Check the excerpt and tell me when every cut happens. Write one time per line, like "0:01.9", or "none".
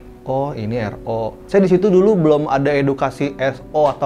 0:01.4